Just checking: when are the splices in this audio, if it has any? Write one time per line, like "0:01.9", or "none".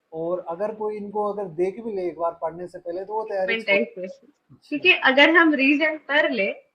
0:03.5